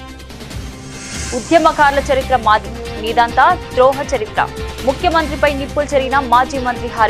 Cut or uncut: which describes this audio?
cut